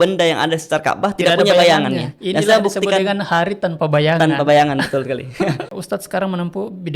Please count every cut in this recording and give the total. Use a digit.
1